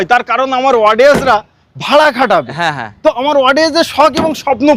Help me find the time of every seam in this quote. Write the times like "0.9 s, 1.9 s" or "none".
none